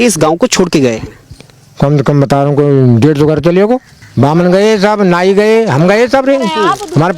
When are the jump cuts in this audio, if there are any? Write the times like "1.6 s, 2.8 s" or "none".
4.0 s